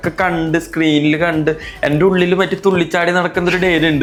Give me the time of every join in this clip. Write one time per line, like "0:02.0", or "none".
none